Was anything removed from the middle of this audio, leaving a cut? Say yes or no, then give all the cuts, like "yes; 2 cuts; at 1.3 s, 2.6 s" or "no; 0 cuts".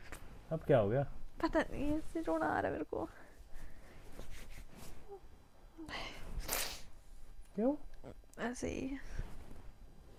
no; 0 cuts